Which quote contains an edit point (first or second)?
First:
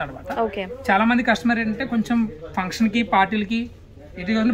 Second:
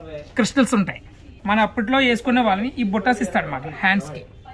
second